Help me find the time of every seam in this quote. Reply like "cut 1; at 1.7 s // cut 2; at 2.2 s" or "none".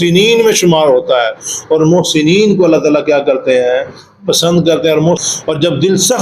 cut 1; at 5.2 s